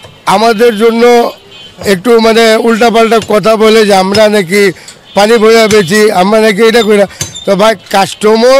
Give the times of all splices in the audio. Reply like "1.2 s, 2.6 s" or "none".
none